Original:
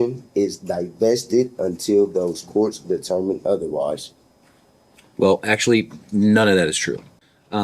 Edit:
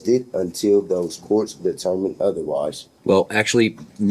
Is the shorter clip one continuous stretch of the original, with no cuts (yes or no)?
no